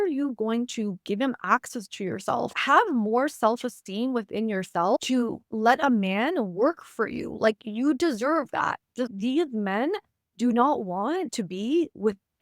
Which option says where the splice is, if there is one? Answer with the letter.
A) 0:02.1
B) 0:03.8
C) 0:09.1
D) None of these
C